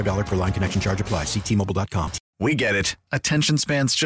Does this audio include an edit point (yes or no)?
yes